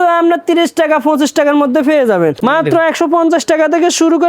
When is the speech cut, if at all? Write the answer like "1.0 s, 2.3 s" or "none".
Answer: 2.4 s